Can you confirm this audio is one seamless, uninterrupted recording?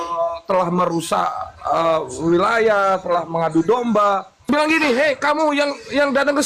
no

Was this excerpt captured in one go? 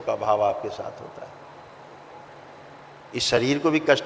no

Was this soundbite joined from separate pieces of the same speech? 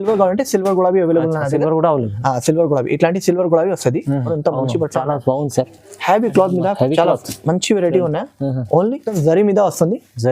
yes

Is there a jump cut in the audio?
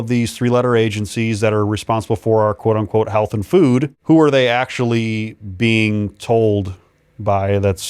yes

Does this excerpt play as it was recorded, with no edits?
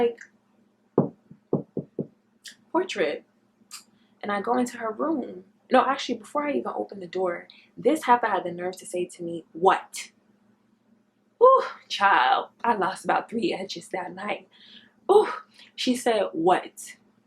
yes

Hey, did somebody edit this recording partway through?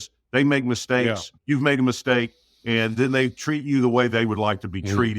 yes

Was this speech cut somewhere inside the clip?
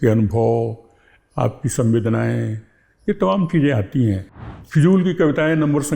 yes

